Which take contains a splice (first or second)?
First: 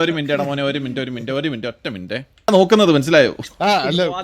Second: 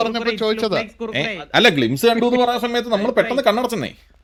first